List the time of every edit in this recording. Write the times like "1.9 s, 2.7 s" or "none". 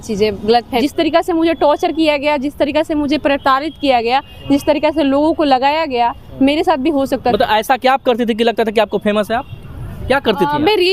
0.8 s, 7.3 s